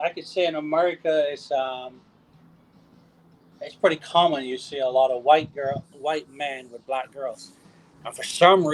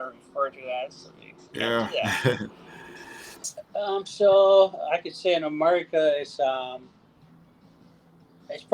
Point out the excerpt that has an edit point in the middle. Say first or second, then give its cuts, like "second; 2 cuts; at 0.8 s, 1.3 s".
second; 1 cut; at 3.4 s